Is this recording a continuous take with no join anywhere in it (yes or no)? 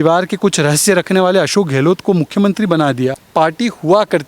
no